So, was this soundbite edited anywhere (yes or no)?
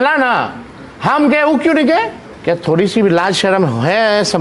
yes